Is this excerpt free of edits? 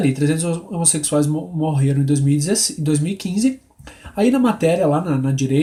yes; 0 cuts

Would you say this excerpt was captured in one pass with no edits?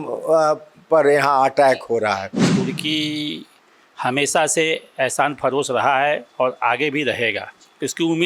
no; 1 cut; at 2.5 s

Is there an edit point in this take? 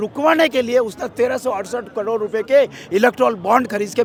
no; 0 cuts

